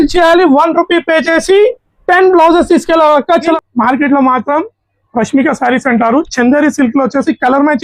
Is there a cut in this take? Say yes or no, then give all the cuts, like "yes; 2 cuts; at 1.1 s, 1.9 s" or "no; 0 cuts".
yes; 1 cut; at 3.5 s